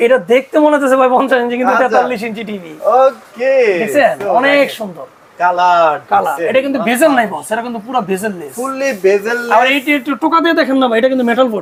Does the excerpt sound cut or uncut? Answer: uncut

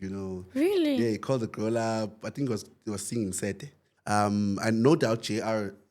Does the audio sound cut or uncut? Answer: cut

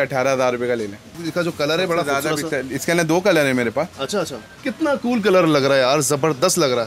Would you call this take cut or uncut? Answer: cut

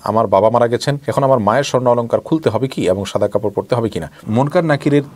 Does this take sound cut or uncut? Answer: cut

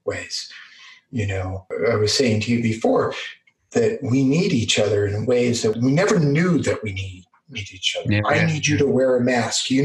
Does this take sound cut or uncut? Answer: cut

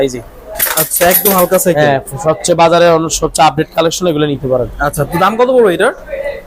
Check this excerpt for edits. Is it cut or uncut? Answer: uncut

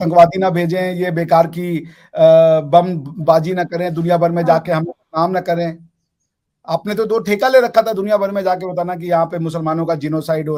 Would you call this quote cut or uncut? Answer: uncut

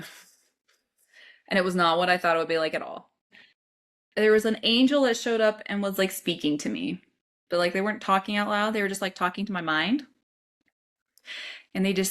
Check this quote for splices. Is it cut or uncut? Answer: cut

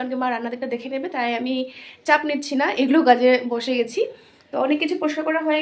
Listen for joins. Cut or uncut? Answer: uncut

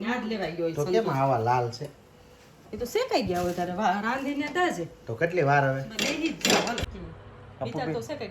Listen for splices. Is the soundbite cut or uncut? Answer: cut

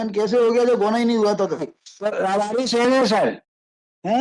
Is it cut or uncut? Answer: uncut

